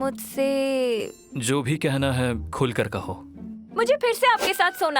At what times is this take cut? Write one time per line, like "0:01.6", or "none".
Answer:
0:01.2